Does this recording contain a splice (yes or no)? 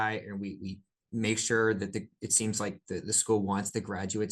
no